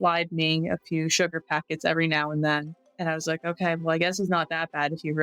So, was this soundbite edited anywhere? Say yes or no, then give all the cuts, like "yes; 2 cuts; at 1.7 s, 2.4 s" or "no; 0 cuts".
yes; 1 cut; at 2.8 s